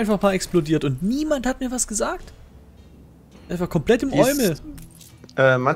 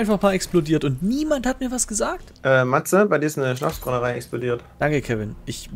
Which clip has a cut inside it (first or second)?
second